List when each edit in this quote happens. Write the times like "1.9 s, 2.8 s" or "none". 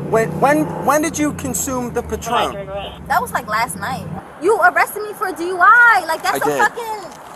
4.1 s